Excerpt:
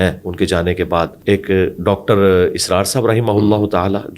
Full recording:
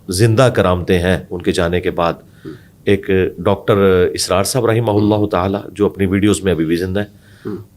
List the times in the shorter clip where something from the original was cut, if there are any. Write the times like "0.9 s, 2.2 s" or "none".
1.2 s